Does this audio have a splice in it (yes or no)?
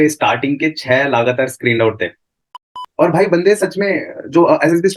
yes